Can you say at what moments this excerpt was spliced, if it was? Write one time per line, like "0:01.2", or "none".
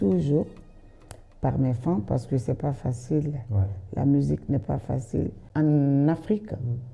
0:05.4